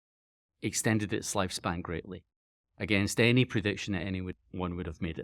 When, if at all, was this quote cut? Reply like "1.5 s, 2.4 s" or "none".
4.3 s